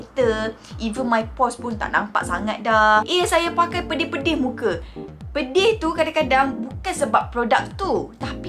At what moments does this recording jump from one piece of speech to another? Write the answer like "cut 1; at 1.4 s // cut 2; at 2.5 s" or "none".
cut 1; at 3.1 s